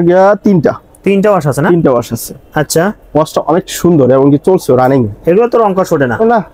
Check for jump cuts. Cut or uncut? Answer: uncut